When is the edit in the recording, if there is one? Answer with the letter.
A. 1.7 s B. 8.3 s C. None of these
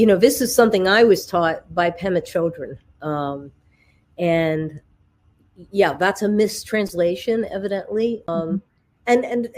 B